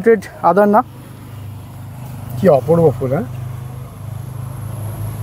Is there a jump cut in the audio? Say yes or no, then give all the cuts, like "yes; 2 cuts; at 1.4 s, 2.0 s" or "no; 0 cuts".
no; 0 cuts